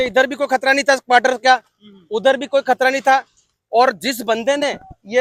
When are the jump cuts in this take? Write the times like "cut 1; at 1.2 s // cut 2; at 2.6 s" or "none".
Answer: none